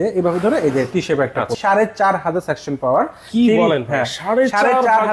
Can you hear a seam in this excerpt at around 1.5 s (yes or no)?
yes